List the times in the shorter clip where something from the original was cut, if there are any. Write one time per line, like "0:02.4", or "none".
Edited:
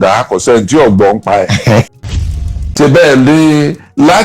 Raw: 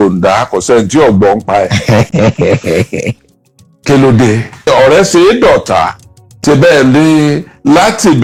0:02.1